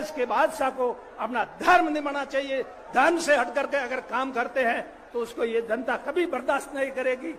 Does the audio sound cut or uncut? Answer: uncut